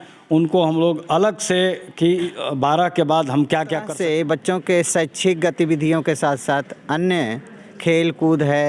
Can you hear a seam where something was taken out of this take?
yes; 1 cut; at 3.9 s

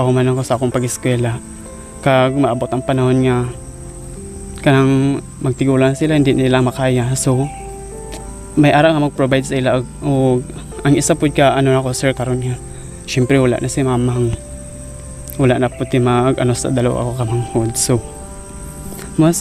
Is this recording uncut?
yes; 0 cuts

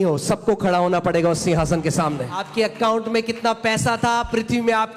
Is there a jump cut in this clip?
yes; 1 cut; at 2.4 s

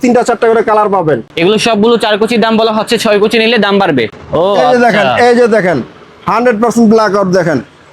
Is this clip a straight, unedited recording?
no; 2 cuts; at 1.3 s, 4.1 s

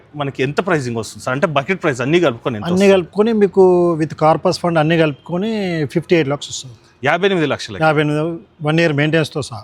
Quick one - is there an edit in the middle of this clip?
no; 0 cuts

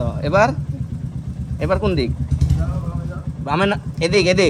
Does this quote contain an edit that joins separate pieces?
no; 0 cuts

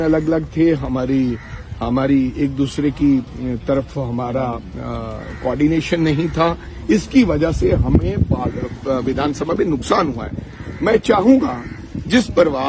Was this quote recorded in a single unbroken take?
yes; 0 cuts

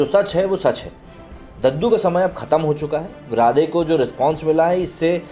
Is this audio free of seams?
yes; 0 cuts

